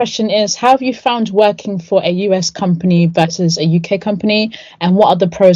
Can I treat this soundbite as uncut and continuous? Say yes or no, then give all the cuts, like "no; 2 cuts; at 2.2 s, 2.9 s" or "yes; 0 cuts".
yes; 0 cuts